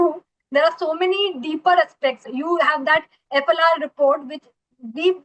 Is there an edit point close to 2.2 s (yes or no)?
yes